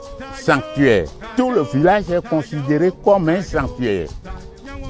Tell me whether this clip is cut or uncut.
cut